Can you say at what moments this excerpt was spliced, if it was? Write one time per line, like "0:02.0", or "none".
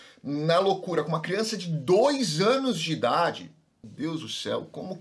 0:03.8